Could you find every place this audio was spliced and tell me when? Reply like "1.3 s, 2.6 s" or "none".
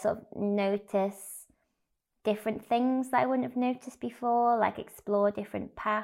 none

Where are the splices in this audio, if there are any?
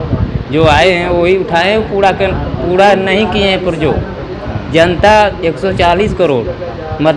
none

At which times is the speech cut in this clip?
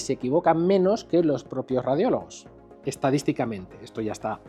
none

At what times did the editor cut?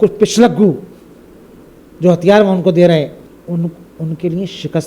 3.3 s

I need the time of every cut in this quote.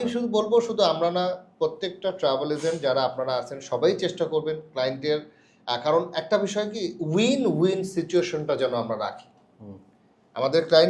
none

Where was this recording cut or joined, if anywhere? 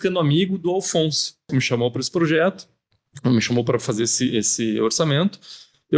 1.5 s

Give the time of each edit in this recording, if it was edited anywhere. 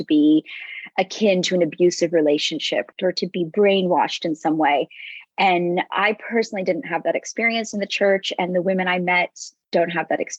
2.9 s

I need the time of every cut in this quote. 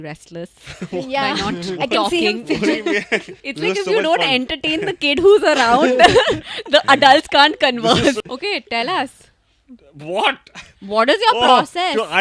3.4 s, 8.2 s

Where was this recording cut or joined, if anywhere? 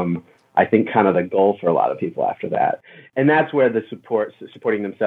2.8 s

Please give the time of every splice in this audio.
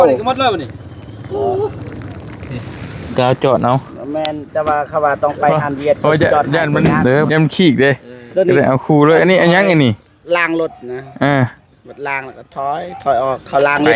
7.3 s

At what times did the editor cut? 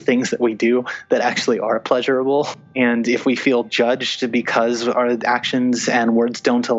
2.5 s

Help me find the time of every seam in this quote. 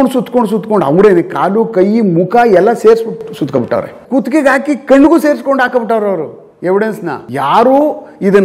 4.0 s, 7.2 s

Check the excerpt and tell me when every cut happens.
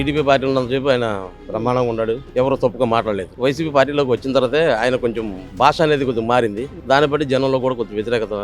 2.3 s

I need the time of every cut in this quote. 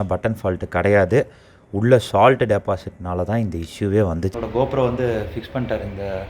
4.3 s

